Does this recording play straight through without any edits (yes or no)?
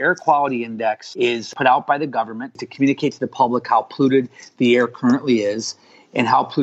no